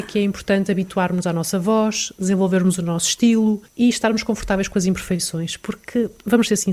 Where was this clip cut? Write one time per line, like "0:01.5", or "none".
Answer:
0:03.7